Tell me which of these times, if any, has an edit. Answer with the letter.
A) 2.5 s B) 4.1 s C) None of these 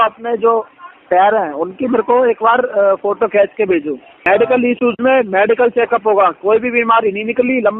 B